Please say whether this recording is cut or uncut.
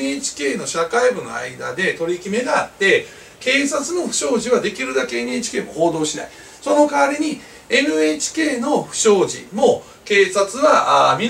uncut